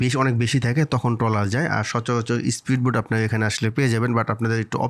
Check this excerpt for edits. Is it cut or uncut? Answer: uncut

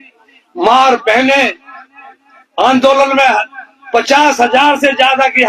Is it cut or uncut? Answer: uncut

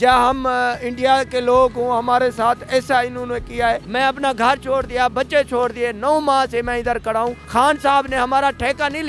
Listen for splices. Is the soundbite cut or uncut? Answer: cut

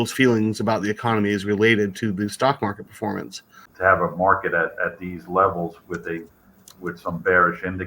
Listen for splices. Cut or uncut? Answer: cut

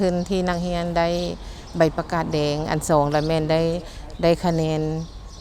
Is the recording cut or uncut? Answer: uncut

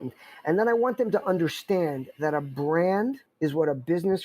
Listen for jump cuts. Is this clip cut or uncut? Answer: cut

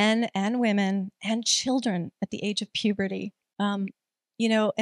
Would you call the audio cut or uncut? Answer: cut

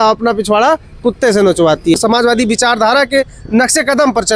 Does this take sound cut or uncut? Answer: cut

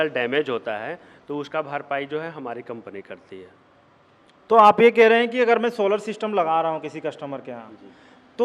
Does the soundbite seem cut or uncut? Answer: uncut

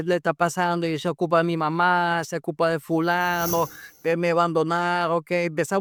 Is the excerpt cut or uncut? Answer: uncut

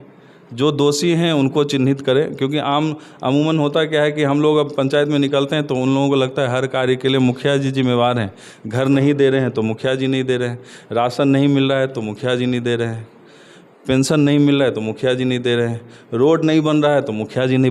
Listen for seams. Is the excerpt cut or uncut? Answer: uncut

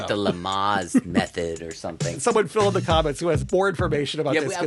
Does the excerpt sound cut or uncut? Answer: cut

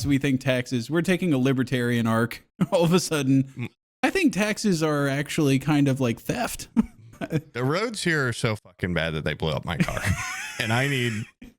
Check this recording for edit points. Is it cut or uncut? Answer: uncut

